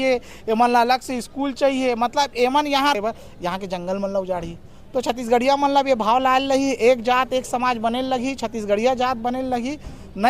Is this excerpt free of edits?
no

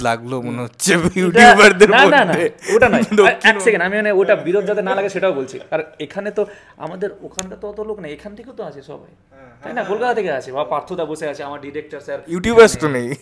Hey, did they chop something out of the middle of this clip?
no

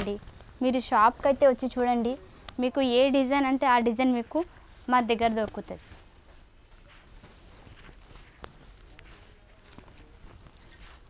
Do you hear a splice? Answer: no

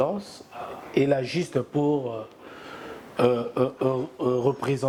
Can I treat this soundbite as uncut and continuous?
yes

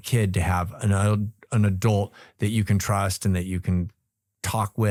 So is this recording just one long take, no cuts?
yes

